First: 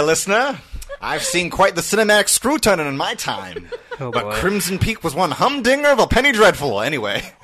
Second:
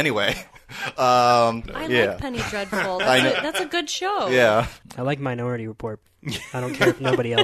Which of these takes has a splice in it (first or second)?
second